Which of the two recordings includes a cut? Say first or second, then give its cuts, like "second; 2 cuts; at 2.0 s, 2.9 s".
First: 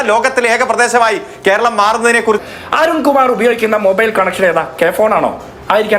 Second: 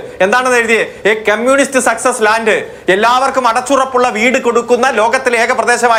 first; 2 cuts; at 2.4 s, 4.7 s